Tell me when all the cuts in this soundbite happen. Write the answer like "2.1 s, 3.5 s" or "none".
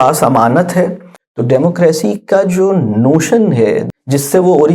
1.1 s, 3.8 s

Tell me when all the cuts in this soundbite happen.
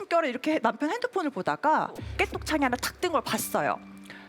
2.0 s

